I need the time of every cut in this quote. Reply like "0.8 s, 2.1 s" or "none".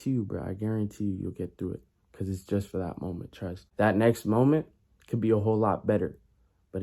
3.6 s